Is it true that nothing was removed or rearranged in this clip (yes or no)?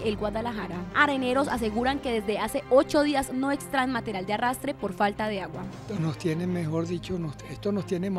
yes